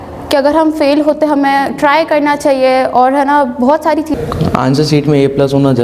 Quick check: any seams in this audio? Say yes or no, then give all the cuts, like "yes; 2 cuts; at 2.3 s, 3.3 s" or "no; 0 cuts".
yes; 1 cut; at 4.1 s